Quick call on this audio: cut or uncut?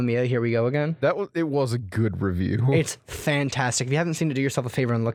uncut